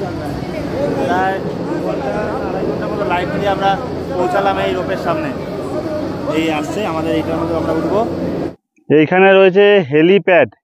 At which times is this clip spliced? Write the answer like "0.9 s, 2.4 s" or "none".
8.6 s